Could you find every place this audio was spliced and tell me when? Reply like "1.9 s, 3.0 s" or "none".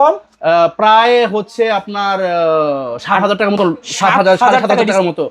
none